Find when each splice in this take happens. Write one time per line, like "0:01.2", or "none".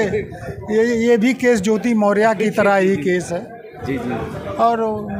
none